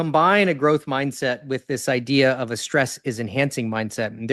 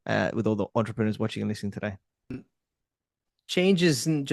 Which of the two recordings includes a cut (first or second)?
second